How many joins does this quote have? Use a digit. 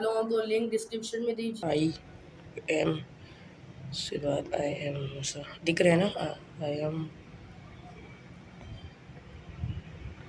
1